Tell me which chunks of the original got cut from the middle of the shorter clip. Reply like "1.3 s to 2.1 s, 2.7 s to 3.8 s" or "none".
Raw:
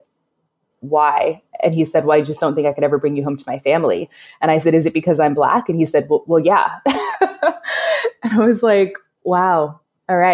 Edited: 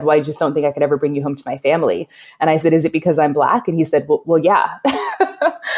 none